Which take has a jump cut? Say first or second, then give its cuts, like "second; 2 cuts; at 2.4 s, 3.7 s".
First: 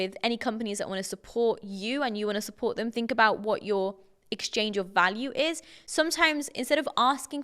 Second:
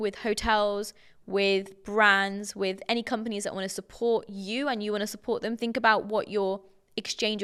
first; 1 cut; at 5.8 s